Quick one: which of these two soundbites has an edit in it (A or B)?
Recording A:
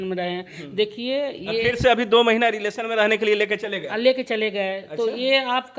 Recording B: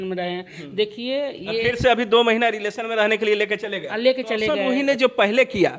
B